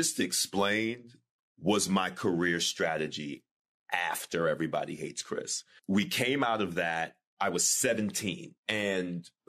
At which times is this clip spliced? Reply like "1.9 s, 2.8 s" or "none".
5.7 s, 8.5 s